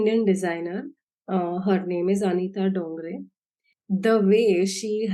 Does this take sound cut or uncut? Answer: uncut